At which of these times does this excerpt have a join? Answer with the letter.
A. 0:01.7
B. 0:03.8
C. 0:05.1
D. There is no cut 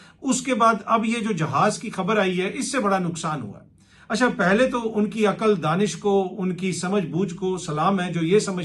D